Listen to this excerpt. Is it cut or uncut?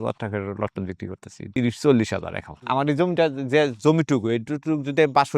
cut